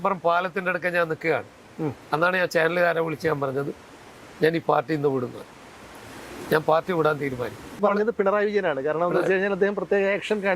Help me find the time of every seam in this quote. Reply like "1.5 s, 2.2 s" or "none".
7.8 s

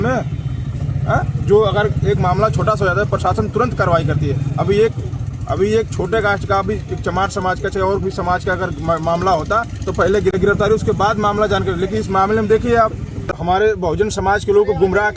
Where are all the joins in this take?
10.4 s, 13.3 s

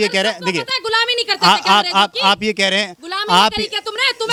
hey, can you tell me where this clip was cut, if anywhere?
none

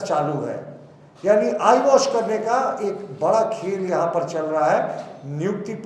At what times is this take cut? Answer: none

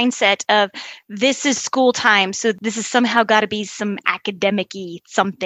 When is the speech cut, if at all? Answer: 2.6 s

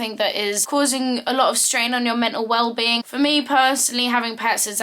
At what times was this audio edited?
3.1 s

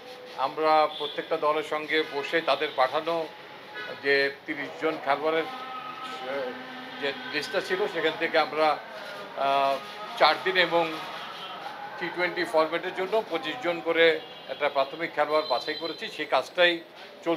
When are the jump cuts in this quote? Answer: none

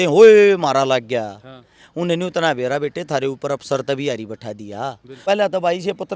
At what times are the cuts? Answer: 5.2 s

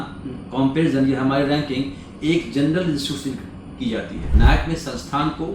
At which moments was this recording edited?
4.3 s

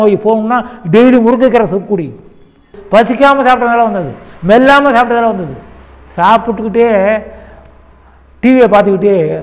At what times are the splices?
2.8 s

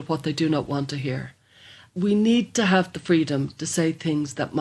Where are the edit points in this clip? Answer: 1.9 s

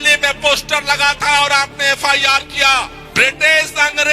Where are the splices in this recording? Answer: 3.0 s

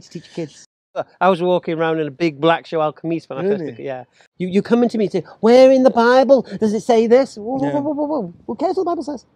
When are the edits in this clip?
0.9 s, 4.2 s

